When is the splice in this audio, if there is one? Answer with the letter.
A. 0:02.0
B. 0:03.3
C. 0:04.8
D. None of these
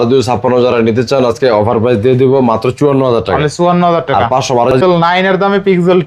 C